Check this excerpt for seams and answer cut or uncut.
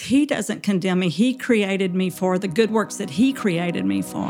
cut